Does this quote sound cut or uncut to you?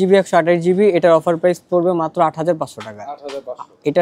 uncut